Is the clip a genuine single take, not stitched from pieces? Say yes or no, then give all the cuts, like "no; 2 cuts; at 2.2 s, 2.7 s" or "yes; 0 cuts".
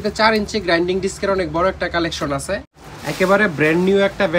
no; 1 cut; at 2.7 s